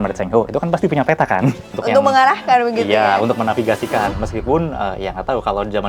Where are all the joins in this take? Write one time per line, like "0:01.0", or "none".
0:01.7